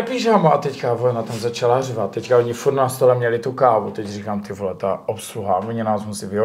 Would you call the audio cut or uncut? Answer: uncut